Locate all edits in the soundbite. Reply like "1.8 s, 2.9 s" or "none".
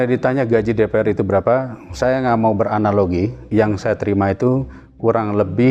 3.5 s

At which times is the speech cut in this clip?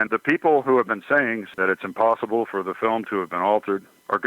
1.5 s

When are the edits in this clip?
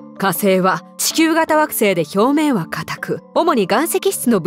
0.9 s, 3.2 s

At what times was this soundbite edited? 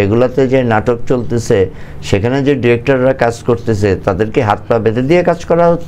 none

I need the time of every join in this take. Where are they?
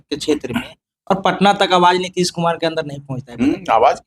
none

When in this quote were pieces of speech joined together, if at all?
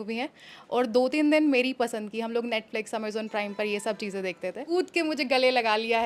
4.6 s

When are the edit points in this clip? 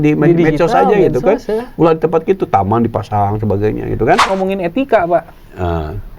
4.3 s

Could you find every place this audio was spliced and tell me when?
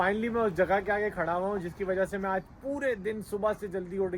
none

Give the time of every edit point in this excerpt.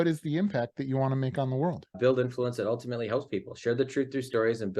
1.9 s

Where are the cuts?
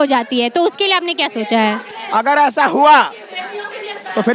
1.9 s

